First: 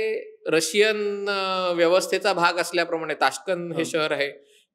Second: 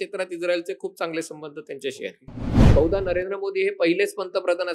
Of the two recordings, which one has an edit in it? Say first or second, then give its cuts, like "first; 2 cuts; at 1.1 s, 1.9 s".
second; 1 cut; at 2.6 s